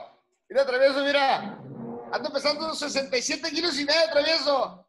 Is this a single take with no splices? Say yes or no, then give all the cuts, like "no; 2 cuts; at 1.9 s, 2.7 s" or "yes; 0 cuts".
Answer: yes; 0 cuts